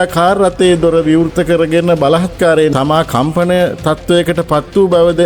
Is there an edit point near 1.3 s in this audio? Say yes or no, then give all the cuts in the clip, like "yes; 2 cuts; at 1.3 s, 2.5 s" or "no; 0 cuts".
no; 1 cut; at 2.7 s